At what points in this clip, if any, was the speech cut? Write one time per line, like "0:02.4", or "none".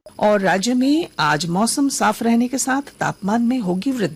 none